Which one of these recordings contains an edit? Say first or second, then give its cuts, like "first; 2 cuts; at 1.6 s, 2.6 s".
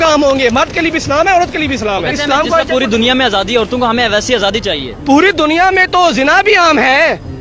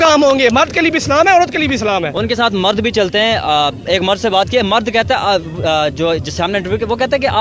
first; 1 cut; at 2.1 s